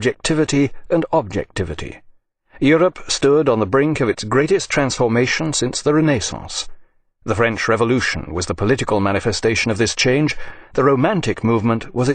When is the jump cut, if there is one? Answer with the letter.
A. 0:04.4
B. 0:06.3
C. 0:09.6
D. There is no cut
B